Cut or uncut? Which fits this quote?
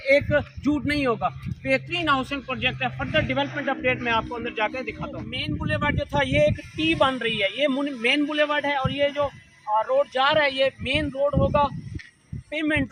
uncut